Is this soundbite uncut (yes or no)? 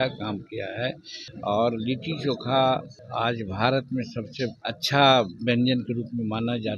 no